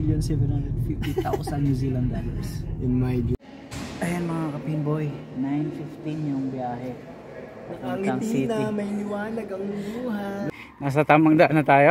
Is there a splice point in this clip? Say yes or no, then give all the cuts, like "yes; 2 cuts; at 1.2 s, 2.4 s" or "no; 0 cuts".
yes; 2 cuts; at 3.4 s, 10.4 s